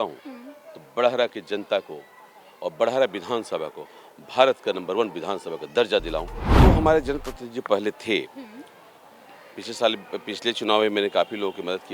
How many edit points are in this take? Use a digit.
1